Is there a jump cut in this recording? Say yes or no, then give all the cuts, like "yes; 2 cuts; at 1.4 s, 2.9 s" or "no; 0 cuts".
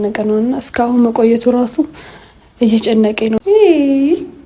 yes; 1 cut; at 3.4 s